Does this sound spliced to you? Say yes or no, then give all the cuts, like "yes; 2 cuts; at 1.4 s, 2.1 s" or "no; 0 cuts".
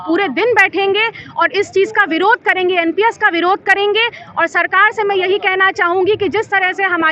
no; 0 cuts